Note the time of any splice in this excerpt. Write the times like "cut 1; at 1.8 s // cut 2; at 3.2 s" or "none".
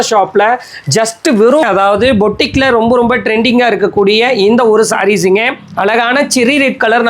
cut 1; at 1.6 s

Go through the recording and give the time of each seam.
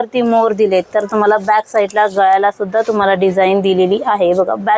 none

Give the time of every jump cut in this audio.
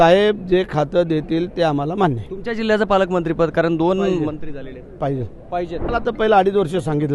cut 1; at 5.9 s

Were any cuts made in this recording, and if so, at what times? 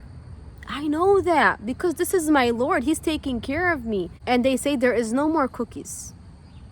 cut 1; at 4.2 s

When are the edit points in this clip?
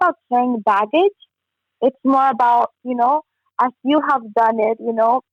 none

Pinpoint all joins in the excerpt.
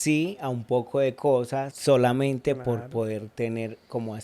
cut 1; at 1.7 s

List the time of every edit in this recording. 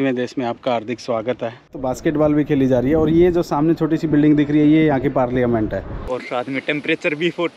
cut 1; at 1.8 s // cut 2; at 6.1 s

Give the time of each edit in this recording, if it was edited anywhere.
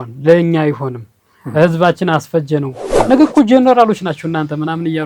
cut 1; at 2.9 s

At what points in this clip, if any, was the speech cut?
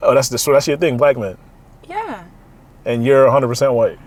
none

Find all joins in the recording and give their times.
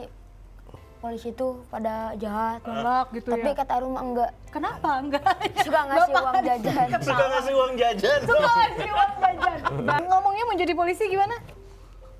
cut 1; at 10.0 s

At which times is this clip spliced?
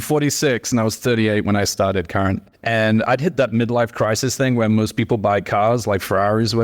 none

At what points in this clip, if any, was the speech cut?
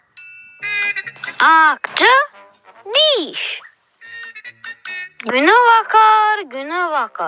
cut 1; at 1.0 s

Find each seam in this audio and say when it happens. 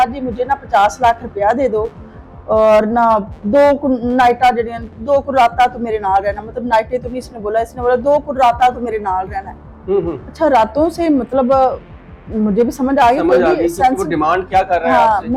none

